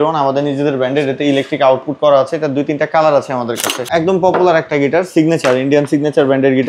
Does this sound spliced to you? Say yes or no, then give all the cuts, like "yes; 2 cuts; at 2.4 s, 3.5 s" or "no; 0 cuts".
yes; 1 cut; at 3.9 s